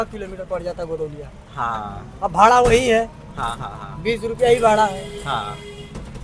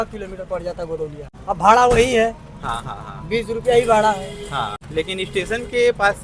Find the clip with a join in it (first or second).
second